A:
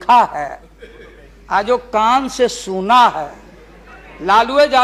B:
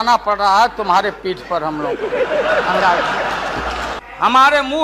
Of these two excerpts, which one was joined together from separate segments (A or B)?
B